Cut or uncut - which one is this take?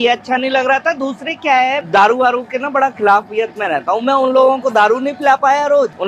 uncut